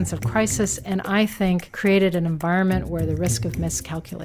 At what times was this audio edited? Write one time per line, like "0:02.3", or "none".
0:01.7